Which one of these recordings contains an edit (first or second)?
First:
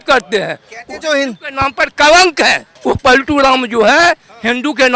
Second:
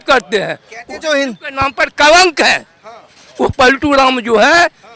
first